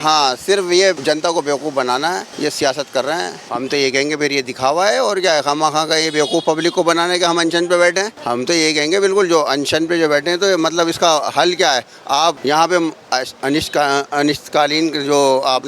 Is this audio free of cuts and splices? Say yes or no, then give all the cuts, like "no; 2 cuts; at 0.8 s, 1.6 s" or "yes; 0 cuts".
no; 5 cuts; at 1.0 s, 2.3 s, 3.4 s, 8.2 s, 12.4 s